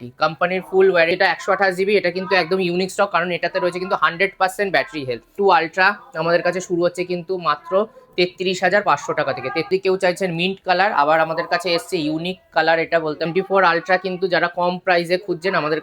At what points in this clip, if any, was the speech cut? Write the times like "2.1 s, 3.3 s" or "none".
1.1 s, 5.4 s, 9.7 s, 13.3 s